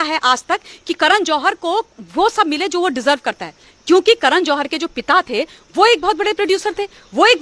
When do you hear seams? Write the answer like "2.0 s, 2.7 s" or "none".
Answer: none